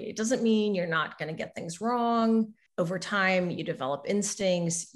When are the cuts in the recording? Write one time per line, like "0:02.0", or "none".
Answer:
0:02.6